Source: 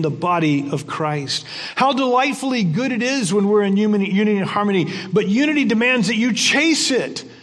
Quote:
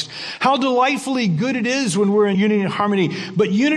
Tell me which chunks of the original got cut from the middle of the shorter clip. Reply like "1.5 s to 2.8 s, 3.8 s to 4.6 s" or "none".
3.7 s to 4.1 s

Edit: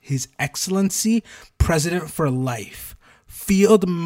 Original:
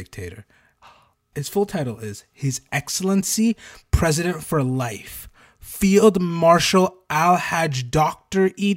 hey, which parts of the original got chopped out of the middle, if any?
none

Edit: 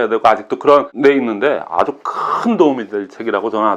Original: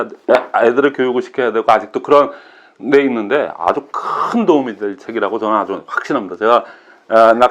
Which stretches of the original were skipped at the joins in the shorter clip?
2.3 s to 2.8 s

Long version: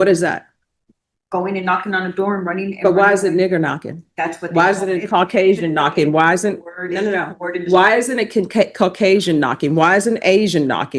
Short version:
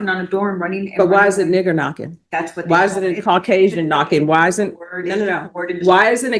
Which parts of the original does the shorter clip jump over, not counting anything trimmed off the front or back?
none

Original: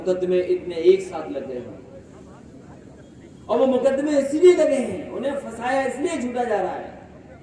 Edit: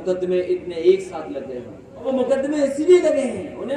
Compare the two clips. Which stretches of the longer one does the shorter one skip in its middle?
2.1 s to 3.6 s

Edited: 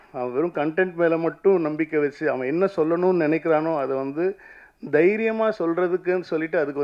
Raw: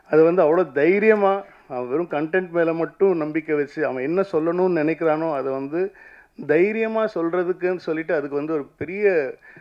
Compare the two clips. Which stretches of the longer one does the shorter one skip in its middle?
none

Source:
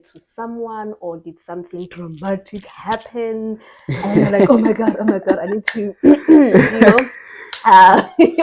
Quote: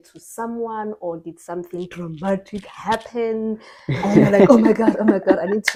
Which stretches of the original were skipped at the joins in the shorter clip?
none

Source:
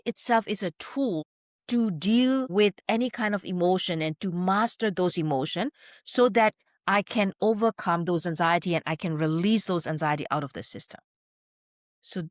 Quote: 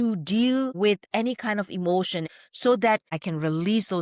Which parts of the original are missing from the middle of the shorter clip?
4.1 s to 5.8 s, 6.7 s to 8.9 s

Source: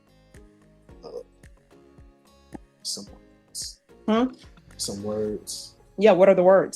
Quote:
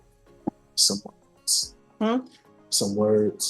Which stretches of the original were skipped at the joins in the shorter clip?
none

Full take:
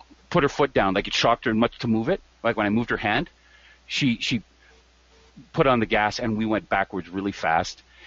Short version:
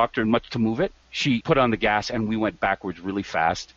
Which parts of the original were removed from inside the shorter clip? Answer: 2.3 s to 5.1 s

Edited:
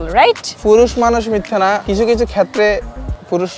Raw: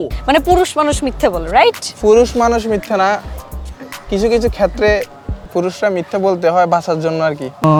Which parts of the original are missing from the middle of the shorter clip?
3.2 s to 4.1 s

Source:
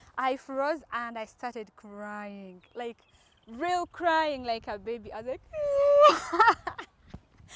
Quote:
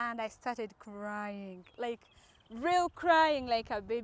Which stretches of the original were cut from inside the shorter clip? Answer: none

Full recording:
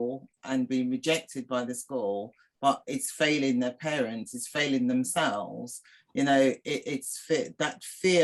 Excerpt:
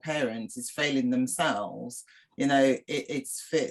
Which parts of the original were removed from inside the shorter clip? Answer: none

